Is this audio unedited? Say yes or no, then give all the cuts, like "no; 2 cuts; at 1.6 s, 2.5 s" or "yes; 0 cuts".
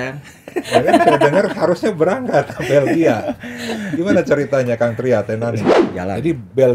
no; 1 cut; at 5.8 s